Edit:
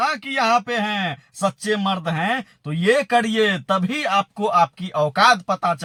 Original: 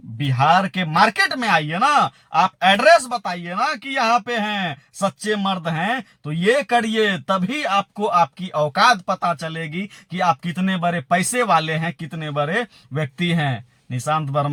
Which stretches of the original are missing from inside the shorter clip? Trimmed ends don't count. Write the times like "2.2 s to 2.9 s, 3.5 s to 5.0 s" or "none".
none